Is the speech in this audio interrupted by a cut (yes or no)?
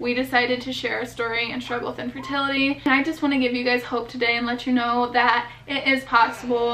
yes